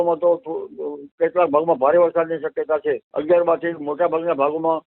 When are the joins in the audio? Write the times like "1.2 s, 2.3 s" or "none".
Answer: 3.1 s